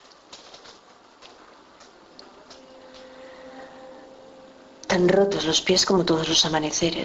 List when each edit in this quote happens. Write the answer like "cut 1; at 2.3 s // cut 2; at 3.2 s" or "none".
cut 1; at 4.2 s